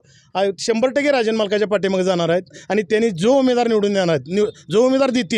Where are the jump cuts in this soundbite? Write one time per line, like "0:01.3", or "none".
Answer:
none